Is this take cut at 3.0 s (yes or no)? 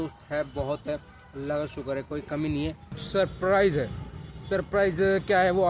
yes